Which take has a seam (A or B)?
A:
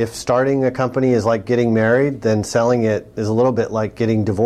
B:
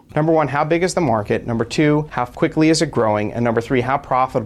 B